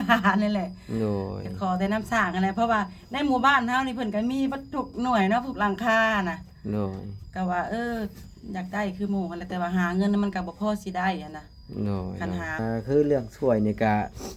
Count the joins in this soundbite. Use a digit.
1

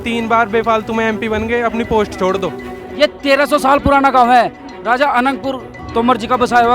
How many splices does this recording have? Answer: 2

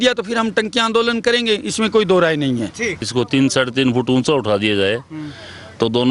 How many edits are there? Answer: 1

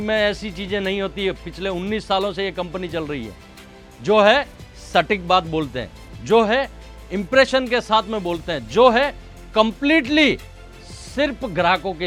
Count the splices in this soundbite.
0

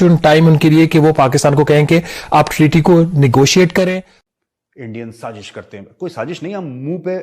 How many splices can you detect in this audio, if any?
1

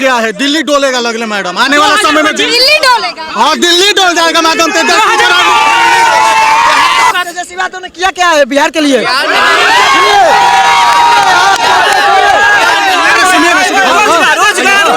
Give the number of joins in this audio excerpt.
1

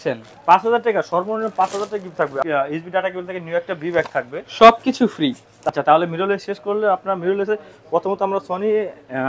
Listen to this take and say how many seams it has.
2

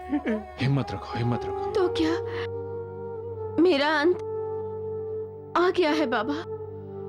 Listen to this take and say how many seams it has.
1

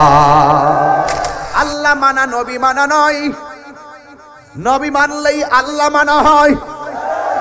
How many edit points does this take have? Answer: 1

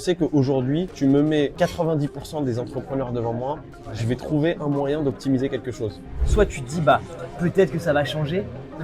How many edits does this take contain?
3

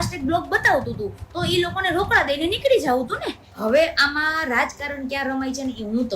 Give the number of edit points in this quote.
1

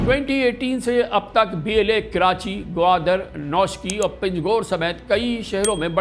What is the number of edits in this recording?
0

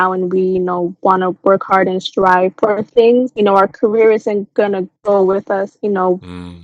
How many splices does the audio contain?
0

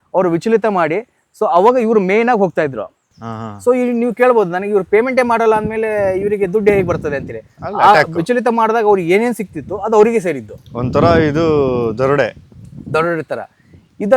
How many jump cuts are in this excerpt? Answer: 0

